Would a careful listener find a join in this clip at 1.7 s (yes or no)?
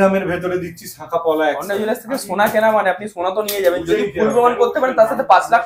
yes